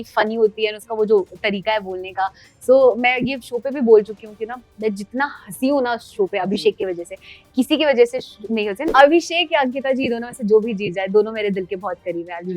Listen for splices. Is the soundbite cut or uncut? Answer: cut